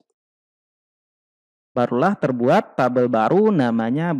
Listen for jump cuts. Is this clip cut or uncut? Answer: uncut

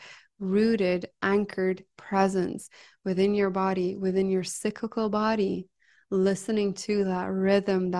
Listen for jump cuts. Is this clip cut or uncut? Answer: uncut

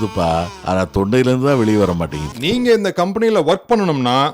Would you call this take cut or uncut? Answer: cut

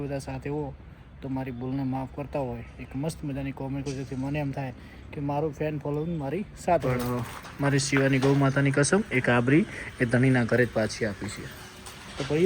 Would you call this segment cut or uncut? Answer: cut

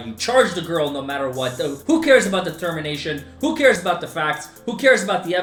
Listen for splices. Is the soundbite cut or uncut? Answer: uncut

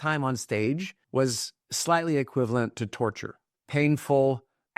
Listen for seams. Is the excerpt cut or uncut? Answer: cut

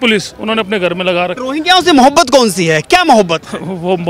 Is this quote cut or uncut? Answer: cut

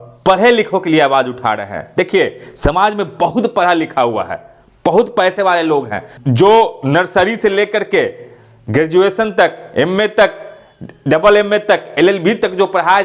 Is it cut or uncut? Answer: uncut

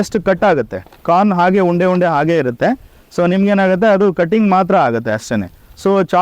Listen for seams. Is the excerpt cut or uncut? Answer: uncut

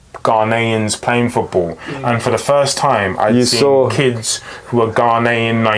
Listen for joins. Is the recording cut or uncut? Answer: uncut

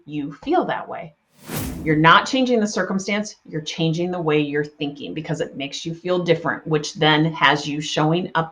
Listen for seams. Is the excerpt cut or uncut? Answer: cut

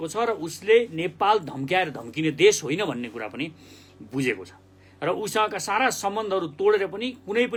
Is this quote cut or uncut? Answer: uncut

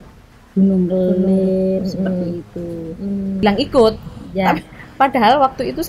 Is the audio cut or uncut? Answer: cut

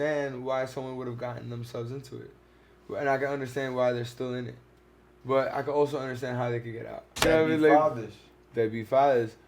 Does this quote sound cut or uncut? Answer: cut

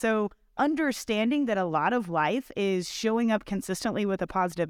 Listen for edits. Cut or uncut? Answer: uncut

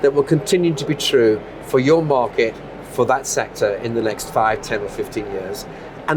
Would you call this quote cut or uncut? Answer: uncut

